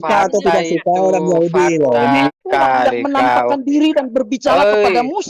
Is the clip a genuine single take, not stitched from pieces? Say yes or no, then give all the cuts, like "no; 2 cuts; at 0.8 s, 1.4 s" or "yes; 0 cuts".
no; 1 cut; at 2.3 s